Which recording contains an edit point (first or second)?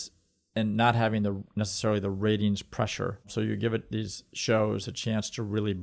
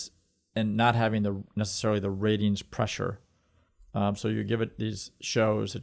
first